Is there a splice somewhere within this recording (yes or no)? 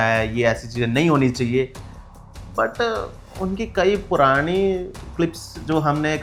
no